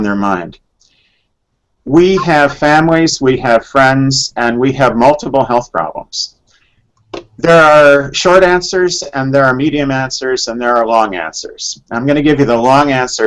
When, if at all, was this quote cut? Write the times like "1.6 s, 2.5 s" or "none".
5.0 s